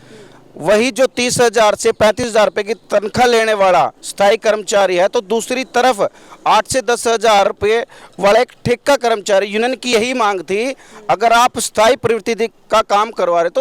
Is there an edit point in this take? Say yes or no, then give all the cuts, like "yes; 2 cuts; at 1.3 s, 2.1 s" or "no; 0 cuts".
no; 0 cuts